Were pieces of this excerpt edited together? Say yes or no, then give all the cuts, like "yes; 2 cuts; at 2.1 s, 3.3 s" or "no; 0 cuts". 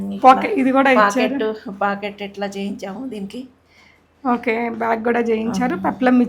no; 0 cuts